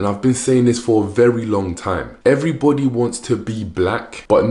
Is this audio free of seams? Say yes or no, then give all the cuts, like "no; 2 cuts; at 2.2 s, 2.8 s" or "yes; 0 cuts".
yes; 0 cuts